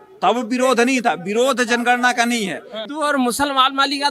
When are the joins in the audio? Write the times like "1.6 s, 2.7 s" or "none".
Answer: 2.8 s